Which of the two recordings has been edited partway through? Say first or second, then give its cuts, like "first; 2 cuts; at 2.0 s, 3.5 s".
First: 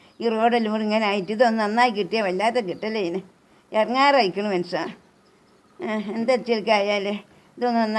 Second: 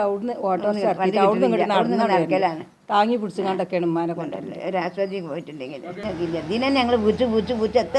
second; 1 cut; at 5.9 s